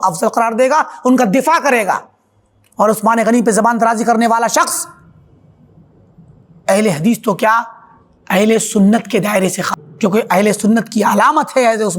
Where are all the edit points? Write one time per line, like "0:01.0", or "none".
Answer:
0:09.6